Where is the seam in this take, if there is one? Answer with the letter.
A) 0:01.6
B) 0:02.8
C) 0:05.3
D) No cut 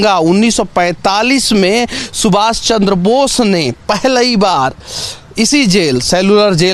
D